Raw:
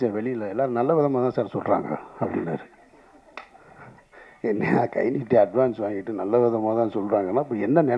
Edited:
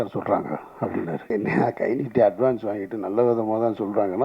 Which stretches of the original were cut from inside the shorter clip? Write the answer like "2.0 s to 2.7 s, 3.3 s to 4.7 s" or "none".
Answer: 2.6 s to 4.4 s